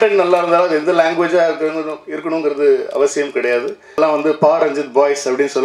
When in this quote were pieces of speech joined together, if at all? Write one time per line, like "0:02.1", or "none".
0:04.0